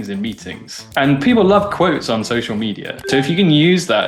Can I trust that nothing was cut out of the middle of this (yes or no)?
no